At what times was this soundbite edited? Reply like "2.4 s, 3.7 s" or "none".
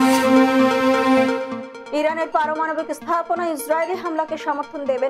1.6 s